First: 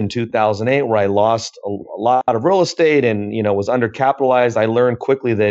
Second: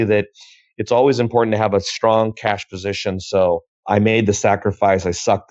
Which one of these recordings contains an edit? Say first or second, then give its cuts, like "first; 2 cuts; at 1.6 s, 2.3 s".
second; 1 cut; at 3.7 s